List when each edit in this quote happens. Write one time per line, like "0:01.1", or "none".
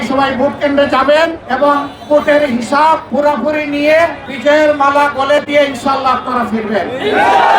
0:01.4
0:03.1
0:04.3